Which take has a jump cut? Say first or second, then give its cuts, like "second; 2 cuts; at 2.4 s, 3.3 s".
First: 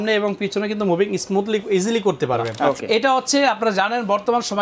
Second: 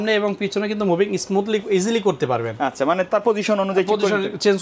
first; 1 cut; at 2.5 s